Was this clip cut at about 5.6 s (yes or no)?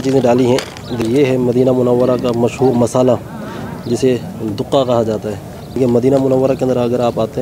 yes